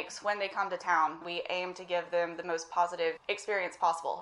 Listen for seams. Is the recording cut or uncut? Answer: cut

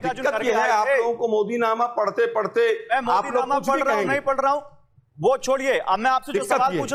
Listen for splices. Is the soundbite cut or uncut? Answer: uncut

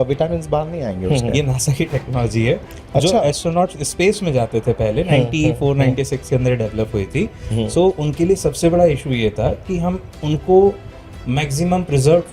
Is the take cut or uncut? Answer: cut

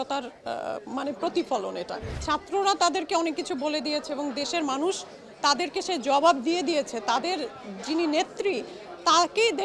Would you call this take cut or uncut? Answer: cut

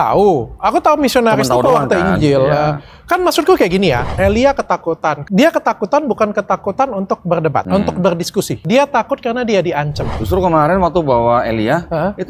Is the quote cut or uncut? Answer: cut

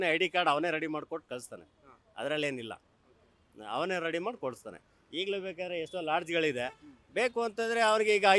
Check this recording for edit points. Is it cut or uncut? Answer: uncut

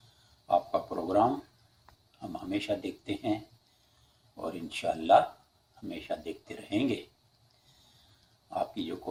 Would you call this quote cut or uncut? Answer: uncut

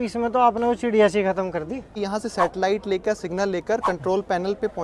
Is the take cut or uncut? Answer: cut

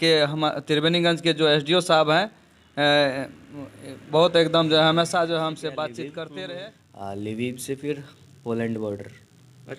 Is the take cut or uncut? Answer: cut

